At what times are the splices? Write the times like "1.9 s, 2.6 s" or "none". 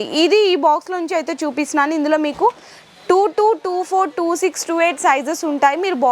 none